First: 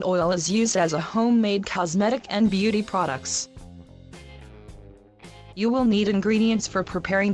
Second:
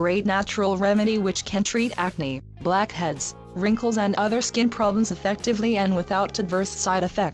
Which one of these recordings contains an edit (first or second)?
second